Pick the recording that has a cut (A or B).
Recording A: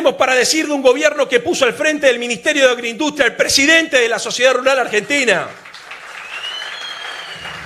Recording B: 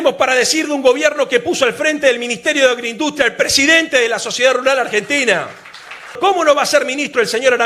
B